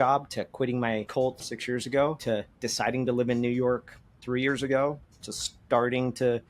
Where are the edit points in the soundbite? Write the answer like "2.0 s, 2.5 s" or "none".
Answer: 1.5 s, 2.2 s